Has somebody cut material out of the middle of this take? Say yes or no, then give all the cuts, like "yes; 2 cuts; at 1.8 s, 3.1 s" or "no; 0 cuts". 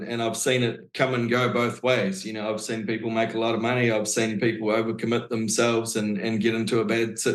no; 0 cuts